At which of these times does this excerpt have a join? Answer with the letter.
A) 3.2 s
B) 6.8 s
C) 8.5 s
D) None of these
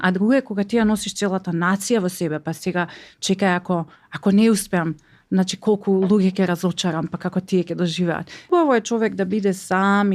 C